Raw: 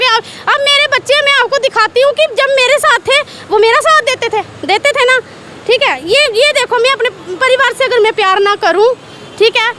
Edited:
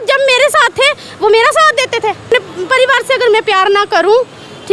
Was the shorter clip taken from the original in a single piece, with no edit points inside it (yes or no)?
no